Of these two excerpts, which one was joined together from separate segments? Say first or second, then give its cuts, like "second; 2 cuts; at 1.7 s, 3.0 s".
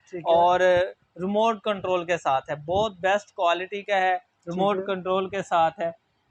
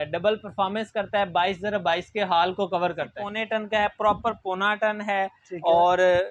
second; 1 cut; at 3.3 s